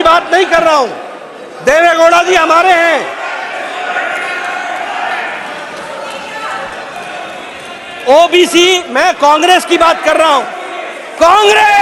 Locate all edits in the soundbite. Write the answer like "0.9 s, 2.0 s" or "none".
none